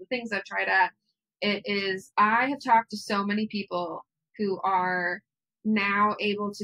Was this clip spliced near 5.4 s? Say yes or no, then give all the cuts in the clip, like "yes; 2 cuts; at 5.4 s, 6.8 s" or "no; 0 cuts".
no; 1 cut; at 2.0 s